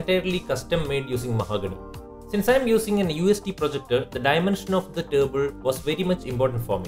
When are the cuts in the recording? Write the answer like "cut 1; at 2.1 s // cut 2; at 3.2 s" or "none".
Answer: none